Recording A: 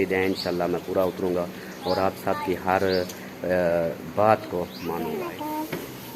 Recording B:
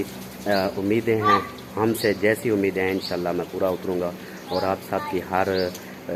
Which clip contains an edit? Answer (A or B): A